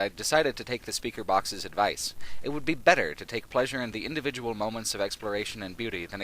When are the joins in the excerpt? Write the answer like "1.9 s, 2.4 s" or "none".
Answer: 1.3 s